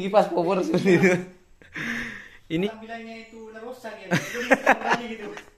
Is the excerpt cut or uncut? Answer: cut